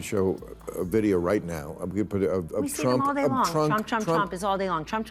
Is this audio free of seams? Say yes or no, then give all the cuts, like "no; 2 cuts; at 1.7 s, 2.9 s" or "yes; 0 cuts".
yes; 0 cuts